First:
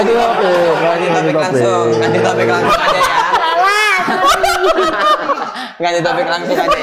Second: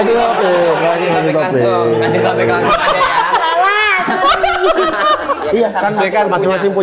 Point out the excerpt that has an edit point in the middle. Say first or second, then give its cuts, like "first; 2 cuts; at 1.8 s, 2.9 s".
second; 1 cut; at 5.4 s